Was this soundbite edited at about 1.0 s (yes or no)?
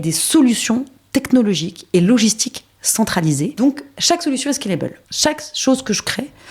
no